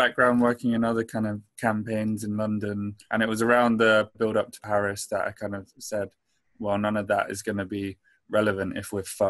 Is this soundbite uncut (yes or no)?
no